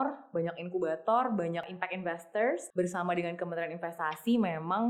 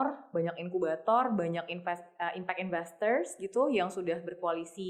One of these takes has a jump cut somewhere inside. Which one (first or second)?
first